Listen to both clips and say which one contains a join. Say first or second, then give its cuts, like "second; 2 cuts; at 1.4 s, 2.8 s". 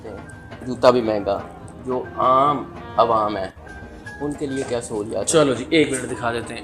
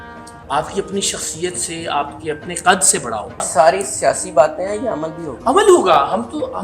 second; 1 cut; at 3.4 s